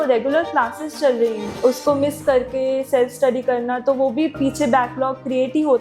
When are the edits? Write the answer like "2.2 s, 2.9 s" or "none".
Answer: 1.5 s